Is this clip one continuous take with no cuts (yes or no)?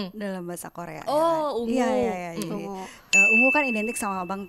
yes